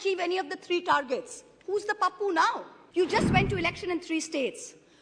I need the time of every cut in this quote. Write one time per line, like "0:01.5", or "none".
0:02.7